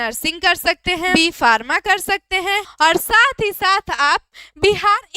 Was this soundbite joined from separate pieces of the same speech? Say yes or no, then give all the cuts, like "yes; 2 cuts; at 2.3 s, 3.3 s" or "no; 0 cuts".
yes; 2 cuts; at 1.1 s, 2.7 s